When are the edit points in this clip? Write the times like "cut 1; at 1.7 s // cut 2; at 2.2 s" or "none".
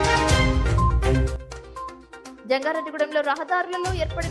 none